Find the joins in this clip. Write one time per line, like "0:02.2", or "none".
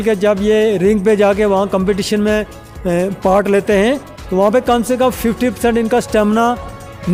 none

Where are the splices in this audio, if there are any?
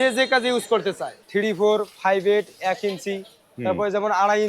0:01.1

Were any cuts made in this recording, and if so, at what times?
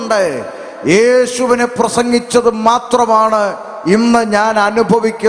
none

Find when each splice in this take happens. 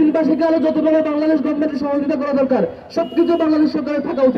none

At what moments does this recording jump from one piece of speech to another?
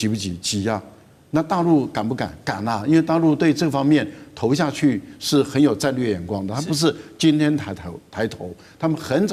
none

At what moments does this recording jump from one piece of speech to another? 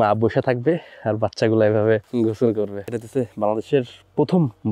0:02.1
0:02.9

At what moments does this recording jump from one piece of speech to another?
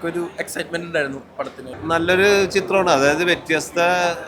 0:01.7

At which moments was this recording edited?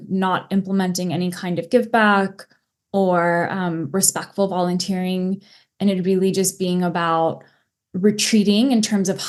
none

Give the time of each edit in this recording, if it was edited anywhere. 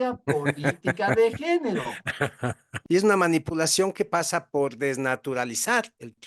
0:02.7

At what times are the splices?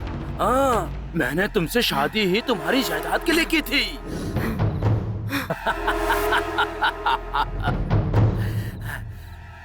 0:05.5

